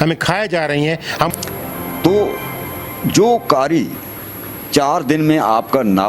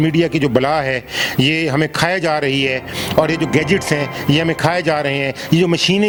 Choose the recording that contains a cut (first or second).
first